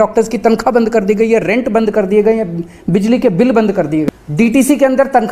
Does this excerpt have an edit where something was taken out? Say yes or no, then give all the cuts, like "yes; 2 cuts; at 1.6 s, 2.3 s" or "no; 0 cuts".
yes; 1 cut; at 4.2 s